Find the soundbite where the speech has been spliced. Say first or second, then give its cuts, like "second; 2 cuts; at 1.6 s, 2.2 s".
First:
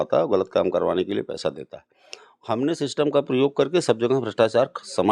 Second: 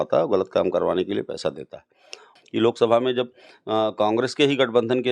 second; 1 cut; at 2.3 s